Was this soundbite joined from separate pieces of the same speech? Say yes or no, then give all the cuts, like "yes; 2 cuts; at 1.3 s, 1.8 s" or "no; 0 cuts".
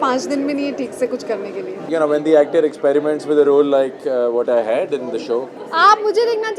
yes; 2 cuts; at 1.8 s, 5.6 s